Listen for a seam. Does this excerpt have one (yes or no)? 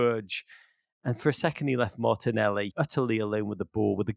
yes